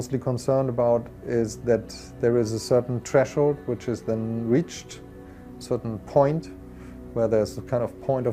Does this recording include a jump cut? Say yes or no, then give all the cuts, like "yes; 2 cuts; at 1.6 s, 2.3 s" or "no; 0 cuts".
no; 0 cuts